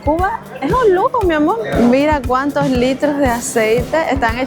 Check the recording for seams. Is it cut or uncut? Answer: cut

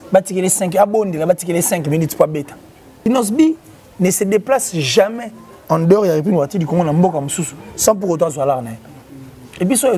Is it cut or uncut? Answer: cut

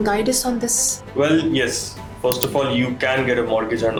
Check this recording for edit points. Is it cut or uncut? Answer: uncut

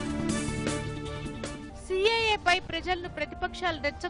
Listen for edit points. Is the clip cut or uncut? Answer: cut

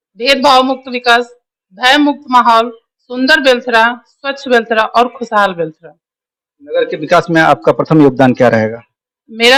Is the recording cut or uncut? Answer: uncut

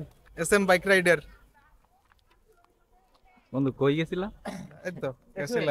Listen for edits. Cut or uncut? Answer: uncut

